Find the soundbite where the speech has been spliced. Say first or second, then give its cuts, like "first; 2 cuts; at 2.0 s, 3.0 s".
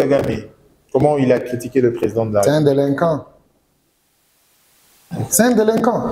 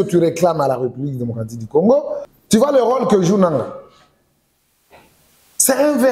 second; 1 cut; at 2.2 s